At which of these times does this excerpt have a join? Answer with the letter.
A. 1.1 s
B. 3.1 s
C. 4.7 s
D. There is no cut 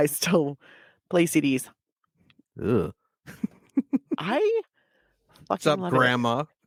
D